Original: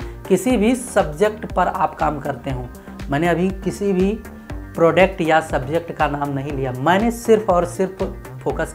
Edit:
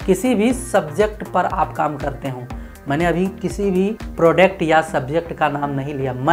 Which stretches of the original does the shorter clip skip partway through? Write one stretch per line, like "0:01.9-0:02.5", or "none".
0:04.3-0:04.6